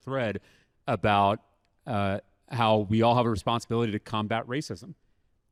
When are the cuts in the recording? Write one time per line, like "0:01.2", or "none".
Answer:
none